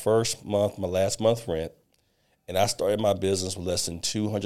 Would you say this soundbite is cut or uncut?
uncut